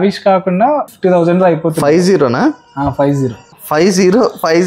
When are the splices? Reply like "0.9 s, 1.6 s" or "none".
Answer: 0.9 s